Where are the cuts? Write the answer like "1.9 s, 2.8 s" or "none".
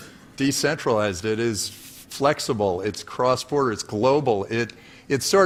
none